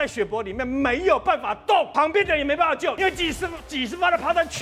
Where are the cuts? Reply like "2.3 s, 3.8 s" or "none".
1.9 s, 3.0 s